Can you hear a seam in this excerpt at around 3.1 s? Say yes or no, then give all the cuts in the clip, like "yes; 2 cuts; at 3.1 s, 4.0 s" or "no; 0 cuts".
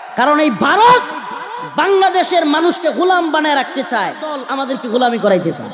no; 1 cut; at 4.4 s